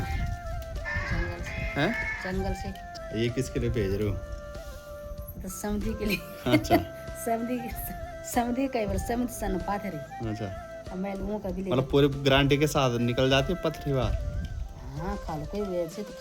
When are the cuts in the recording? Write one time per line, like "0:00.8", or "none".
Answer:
none